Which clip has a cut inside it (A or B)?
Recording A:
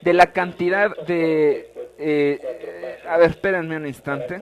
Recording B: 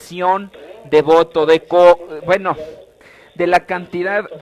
B